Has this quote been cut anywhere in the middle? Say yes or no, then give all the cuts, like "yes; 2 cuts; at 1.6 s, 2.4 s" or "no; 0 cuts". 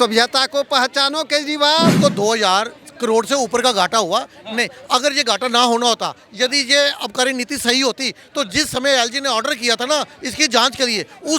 yes; 1 cut; at 2.0 s